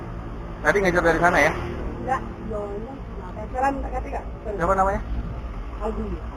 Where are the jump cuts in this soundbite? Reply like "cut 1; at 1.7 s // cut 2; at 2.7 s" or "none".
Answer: none